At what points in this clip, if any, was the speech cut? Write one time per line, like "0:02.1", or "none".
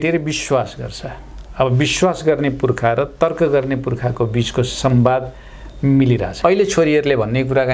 0:06.3